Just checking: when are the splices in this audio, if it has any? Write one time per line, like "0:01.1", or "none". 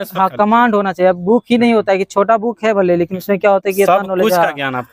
none